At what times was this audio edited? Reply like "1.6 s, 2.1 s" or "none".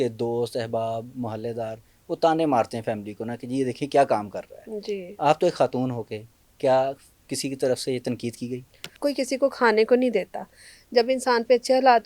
8.9 s